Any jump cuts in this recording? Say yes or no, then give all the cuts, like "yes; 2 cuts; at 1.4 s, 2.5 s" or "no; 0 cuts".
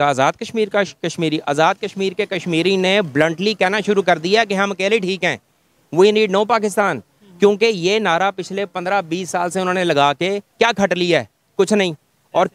no; 0 cuts